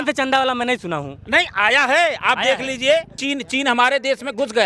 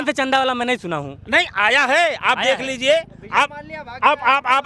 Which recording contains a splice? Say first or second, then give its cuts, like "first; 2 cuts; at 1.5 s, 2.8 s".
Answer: first; 1 cut; at 3.2 s